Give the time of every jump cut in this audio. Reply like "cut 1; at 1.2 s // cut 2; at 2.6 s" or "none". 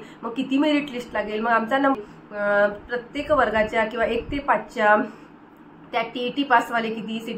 cut 1; at 1.9 s